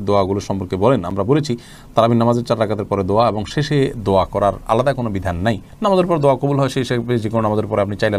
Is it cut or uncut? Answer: uncut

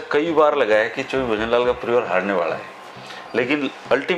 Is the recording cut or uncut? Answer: uncut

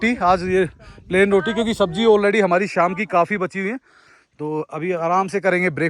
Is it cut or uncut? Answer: uncut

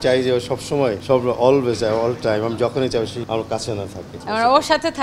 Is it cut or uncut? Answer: cut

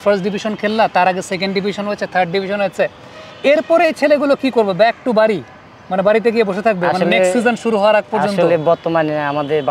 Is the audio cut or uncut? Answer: uncut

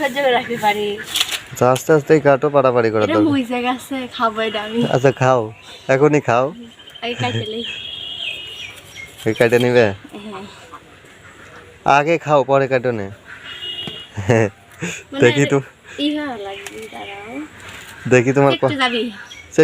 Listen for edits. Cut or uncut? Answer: cut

